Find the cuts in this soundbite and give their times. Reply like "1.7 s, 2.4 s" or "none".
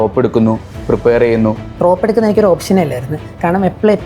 1.7 s